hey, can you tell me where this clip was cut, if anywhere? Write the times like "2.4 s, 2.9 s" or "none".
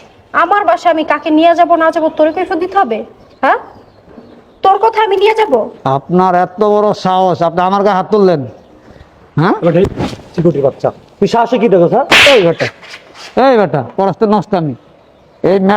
12.1 s